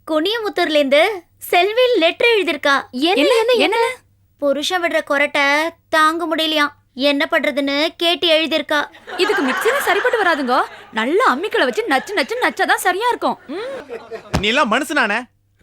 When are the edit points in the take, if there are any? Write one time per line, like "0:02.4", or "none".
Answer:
0:13.8